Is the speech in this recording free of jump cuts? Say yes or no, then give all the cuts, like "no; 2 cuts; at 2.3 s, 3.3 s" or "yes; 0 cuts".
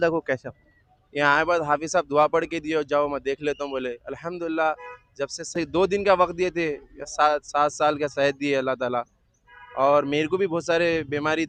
yes; 0 cuts